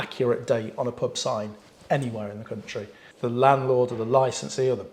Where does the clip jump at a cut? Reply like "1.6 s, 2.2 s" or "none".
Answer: 3.0 s